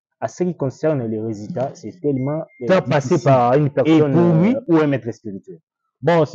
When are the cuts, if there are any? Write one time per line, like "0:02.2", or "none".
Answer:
0:02.6